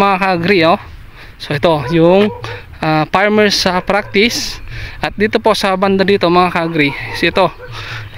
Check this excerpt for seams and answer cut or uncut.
uncut